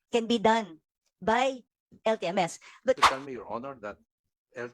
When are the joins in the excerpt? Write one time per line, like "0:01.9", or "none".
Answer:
0:03.0